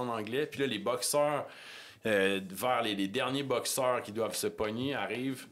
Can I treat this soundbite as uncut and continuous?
yes; 0 cuts

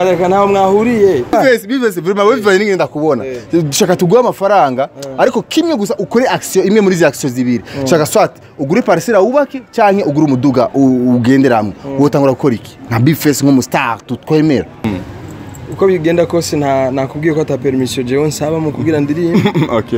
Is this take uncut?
no; 2 cuts; at 1.3 s, 14.9 s

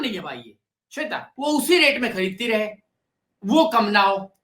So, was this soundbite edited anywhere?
yes; 1 cut; at 1.3 s

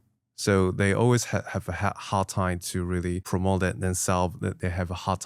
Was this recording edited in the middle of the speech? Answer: no; 0 cuts

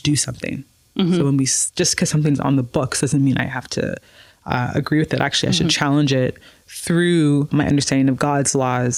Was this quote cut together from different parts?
yes; 1 cut; at 7.5 s

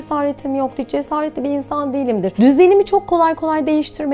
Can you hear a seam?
no; 0 cuts

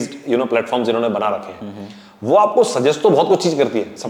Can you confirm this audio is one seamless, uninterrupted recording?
yes; 0 cuts

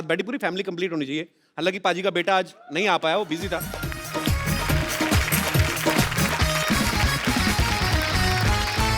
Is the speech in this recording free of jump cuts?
yes; 0 cuts

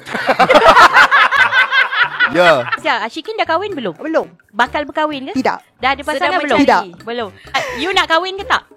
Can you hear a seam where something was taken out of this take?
yes; 1 cut; at 2.7 s

